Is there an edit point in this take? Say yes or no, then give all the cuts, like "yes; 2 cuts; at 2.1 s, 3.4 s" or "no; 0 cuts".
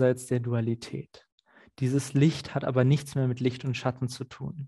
no; 0 cuts